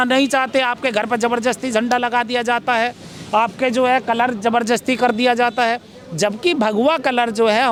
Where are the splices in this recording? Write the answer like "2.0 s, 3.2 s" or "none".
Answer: none